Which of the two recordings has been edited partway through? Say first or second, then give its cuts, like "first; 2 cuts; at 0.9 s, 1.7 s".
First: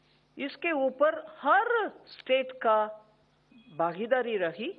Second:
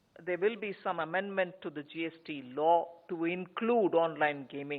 second; 1 cut; at 1.0 s